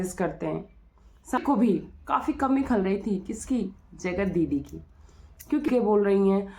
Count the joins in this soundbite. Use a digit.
2